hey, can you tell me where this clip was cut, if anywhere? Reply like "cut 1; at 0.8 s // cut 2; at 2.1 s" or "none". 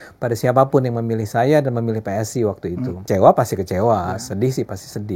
cut 1; at 3.0 s